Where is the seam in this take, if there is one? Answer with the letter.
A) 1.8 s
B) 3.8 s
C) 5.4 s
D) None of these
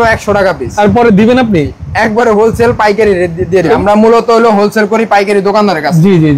B